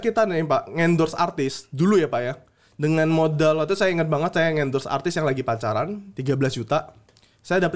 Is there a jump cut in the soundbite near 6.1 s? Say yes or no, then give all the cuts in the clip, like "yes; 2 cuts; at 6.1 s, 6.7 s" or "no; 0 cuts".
yes; 1 cut; at 6.1 s